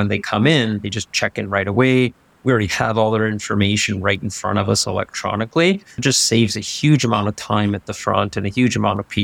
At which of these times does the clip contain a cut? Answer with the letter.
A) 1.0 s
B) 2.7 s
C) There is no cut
C